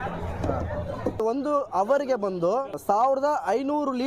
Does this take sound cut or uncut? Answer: cut